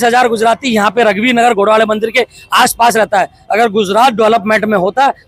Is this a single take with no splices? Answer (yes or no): yes